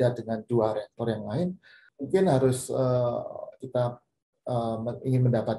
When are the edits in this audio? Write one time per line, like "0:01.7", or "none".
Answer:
0:01.9
0:03.6